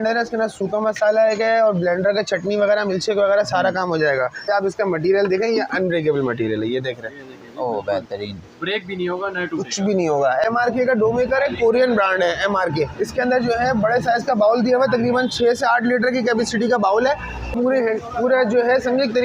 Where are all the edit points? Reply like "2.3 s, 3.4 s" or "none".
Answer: 4.5 s, 10.4 s, 17.5 s

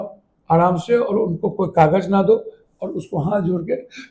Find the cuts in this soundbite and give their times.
none

